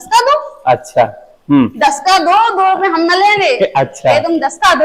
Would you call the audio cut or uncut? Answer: uncut